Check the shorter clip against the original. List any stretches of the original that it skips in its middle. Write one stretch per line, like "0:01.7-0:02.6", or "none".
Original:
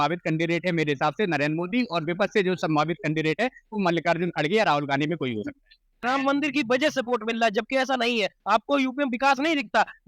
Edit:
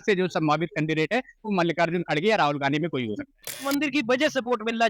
0:05.9-0:06.2